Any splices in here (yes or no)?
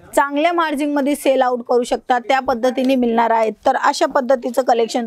no